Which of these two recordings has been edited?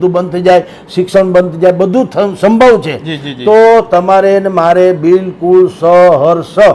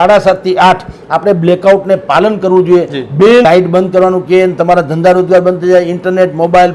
second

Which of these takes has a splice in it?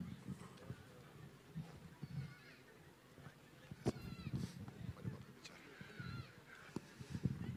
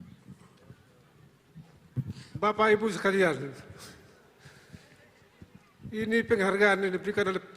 second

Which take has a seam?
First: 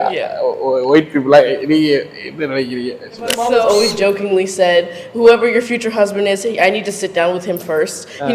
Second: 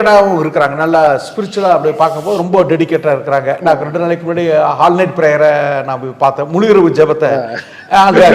first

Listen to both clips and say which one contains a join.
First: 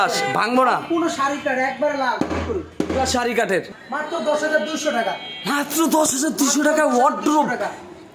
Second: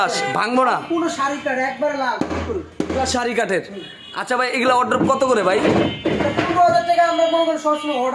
first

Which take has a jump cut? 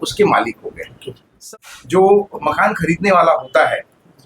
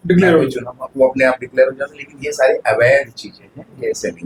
first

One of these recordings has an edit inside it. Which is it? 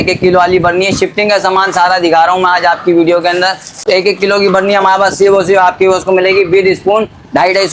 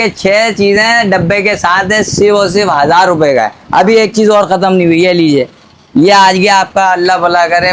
first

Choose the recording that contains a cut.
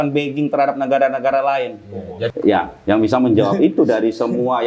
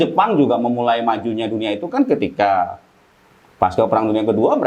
first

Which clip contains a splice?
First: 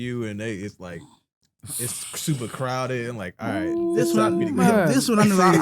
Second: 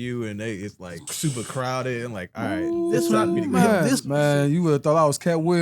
second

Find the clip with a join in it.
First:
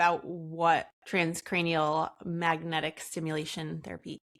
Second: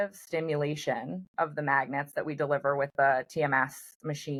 first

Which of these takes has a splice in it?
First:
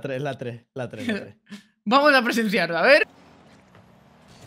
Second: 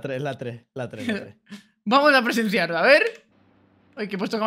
first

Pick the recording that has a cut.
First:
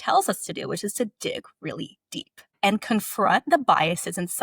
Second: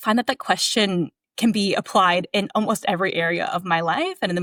first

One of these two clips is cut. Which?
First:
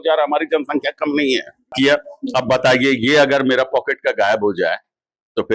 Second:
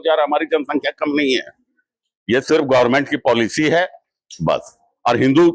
first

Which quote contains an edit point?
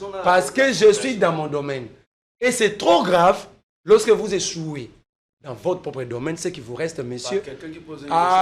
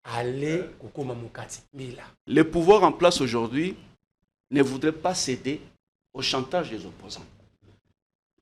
second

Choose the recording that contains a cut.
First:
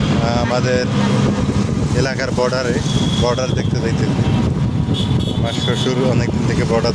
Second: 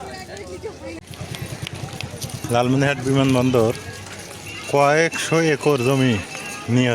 second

